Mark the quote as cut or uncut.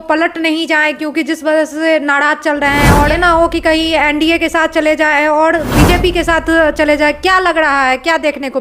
cut